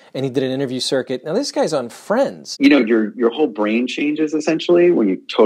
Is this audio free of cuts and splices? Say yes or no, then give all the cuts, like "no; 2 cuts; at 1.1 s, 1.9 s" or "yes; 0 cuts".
no; 1 cut; at 2.5 s